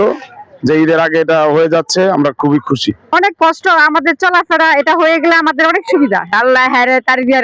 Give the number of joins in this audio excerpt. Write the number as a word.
two